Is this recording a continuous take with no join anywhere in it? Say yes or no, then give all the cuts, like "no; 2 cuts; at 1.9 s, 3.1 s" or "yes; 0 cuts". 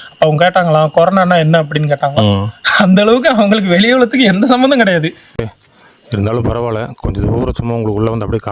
no; 1 cut; at 5.2 s